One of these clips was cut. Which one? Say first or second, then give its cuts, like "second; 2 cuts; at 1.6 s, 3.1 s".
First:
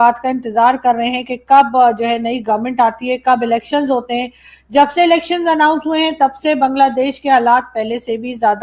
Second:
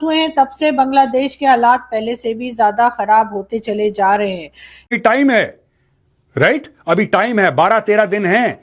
second; 1 cut; at 4.9 s